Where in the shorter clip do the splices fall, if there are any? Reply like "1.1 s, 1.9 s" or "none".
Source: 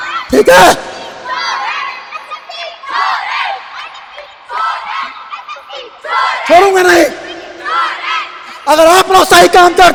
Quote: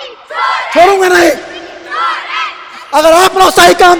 none